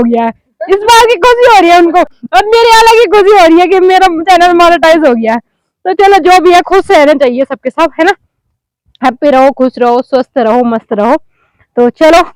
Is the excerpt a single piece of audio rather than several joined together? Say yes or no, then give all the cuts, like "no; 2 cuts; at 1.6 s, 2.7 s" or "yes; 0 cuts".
yes; 0 cuts